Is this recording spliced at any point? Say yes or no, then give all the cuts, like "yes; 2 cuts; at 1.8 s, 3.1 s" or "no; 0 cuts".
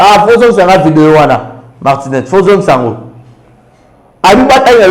no; 0 cuts